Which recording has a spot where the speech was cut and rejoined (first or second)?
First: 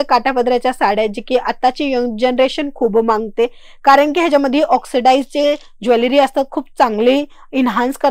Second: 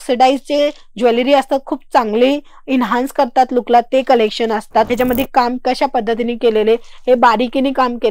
second